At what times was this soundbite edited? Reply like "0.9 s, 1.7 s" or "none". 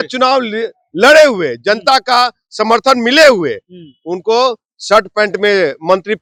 none

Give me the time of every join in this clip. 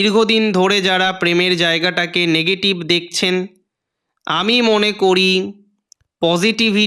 none

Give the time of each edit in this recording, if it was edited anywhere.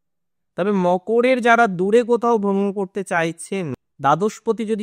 3.7 s

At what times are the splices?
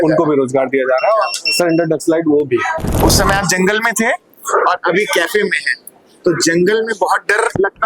2.8 s

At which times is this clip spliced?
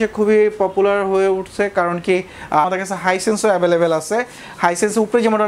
2.7 s

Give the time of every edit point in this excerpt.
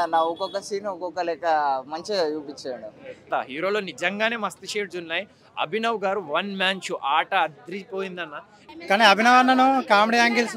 3.2 s, 8.5 s

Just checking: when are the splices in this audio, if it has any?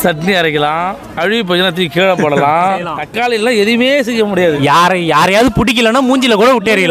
1.0 s, 3.0 s

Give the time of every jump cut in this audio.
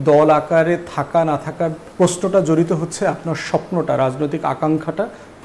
1.8 s

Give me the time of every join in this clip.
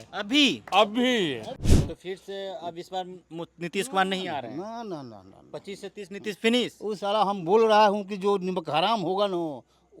1.6 s

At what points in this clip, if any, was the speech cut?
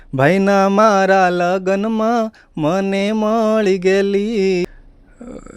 4.7 s

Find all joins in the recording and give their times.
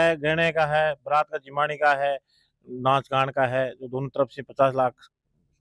none

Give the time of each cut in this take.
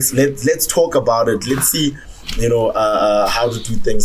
none

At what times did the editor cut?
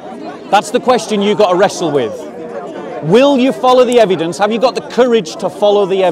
none

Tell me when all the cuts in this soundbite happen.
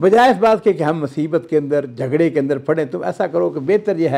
none

